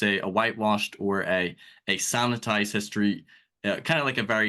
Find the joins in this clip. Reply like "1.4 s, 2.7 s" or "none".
none